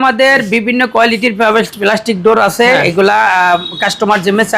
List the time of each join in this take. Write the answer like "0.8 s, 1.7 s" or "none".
none